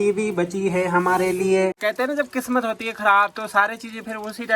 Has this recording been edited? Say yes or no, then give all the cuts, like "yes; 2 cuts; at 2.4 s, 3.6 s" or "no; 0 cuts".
yes; 1 cut; at 1.8 s